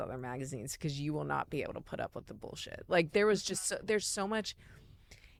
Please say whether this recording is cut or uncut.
uncut